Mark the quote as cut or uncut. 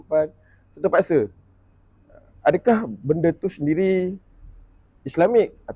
uncut